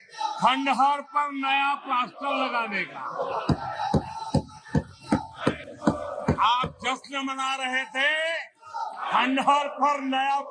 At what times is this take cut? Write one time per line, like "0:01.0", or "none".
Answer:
none